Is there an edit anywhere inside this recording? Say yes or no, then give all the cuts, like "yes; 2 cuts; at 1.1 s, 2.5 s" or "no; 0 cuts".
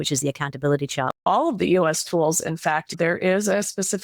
yes; 2 cuts; at 1.2 s, 2.9 s